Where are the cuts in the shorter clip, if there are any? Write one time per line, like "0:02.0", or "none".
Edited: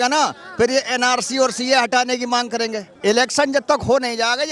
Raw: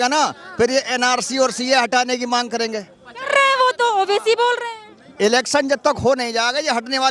0:02.8